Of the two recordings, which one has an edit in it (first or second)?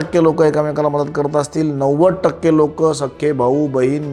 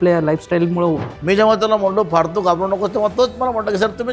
second